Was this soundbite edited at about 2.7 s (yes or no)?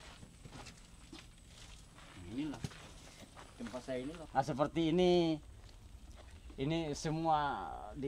no